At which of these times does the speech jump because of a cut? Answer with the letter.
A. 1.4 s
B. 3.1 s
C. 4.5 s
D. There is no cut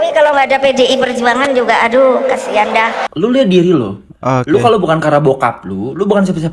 B